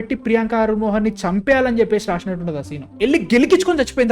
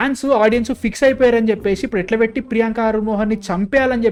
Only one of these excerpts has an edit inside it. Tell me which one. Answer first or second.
first